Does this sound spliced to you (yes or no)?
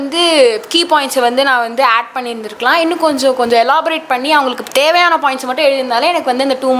no